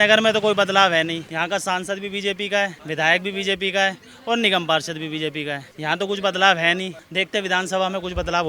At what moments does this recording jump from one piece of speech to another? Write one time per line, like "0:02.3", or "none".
0:01.3
0:02.8
0:05.7
0:07.0